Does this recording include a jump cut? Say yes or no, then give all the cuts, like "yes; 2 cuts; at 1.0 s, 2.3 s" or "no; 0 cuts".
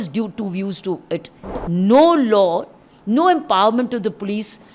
yes; 1 cut; at 1.6 s